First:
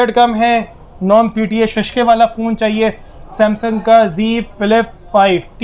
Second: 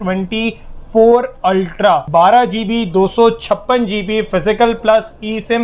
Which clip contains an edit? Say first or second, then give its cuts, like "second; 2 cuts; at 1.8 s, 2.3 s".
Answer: second; 1 cut; at 2.0 s